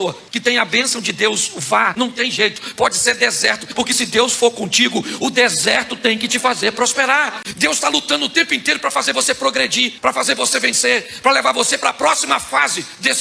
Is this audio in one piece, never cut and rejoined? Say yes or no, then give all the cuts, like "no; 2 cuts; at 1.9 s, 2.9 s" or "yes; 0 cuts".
no; 3 cuts; at 1.9 s, 3.8 s, 7.4 s